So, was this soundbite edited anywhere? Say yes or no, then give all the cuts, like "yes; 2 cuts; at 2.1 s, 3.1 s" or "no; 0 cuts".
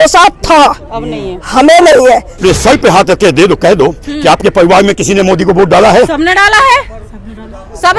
yes; 1 cut; at 2.3 s